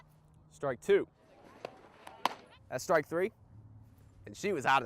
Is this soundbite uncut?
no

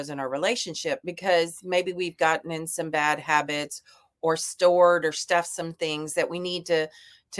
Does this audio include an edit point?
no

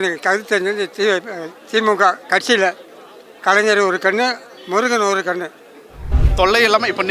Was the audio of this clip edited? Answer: yes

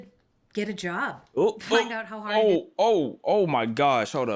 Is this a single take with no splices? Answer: yes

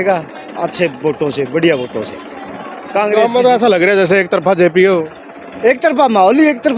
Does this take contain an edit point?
no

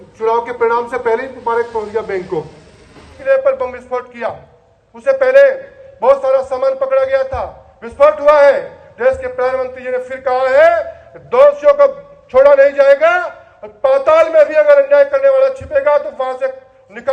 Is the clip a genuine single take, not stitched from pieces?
no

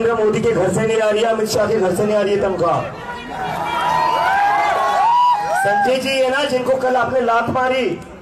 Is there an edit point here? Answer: no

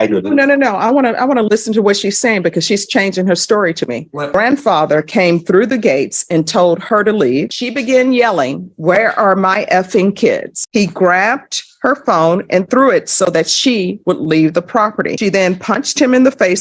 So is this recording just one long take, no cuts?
no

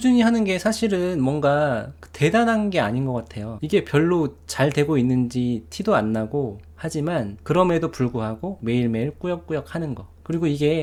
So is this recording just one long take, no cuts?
yes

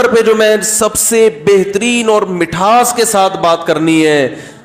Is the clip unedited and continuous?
yes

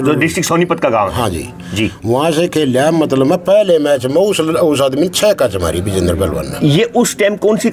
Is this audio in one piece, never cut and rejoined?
yes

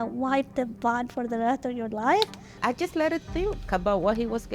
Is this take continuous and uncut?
no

